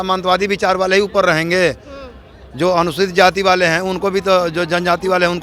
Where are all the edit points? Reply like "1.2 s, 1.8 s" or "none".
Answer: none